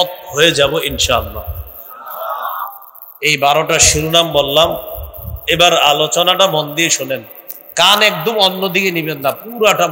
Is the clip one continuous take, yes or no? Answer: yes